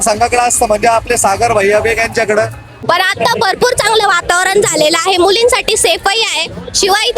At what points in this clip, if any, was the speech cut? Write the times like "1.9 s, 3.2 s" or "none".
2.5 s